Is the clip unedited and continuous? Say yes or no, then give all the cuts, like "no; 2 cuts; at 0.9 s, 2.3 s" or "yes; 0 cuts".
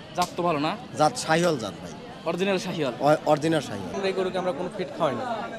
no; 1 cut; at 4.0 s